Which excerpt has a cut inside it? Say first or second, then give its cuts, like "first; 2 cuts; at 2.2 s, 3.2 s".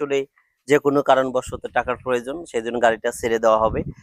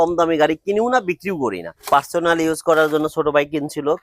second; 1 cut; at 1.7 s